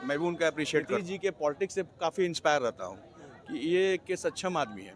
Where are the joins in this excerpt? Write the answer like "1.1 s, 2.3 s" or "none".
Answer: 0.9 s